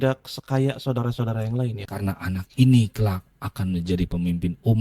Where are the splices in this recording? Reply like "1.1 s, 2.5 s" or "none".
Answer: 1.8 s